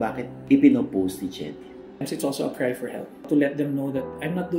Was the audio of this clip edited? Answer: yes; 2 cuts; at 2.1 s, 3.2 s

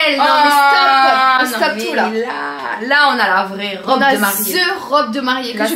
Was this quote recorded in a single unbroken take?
yes; 0 cuts

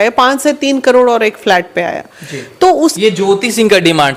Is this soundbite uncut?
yes; 0 cuts

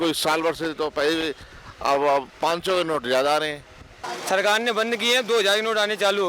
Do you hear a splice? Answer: yes; 1 cut; at 4.0 s

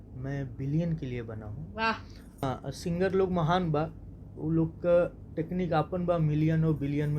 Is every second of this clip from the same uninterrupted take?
no; 1 cut; at 2.4 s

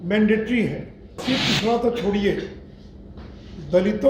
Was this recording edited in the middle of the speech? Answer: yes; 1 cut; at 1.2 s

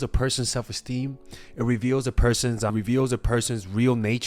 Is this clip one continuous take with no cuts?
no; 1 cut; at 2.7 s

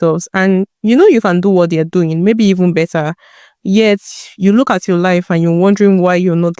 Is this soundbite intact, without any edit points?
yes; 0 cuts

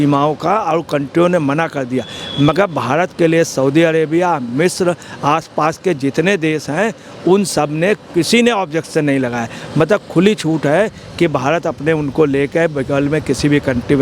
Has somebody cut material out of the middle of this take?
no; 0 cuts

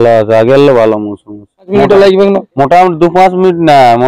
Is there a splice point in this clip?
yes; 1 cut; at 1.7 s

